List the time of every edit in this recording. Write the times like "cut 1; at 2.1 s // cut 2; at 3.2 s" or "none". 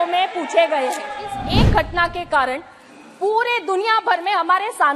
cut 1; at 1.3 s